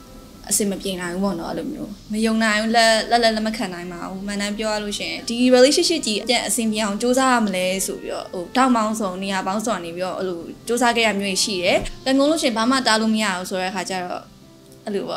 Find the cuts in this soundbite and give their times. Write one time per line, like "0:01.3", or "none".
0:01.9
0:05.2
0:06.2
0:11.9